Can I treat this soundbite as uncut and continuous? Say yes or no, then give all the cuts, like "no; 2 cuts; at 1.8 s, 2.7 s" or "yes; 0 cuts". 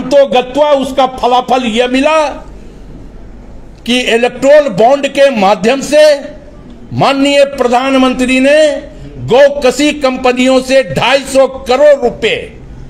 yes; 0 cuts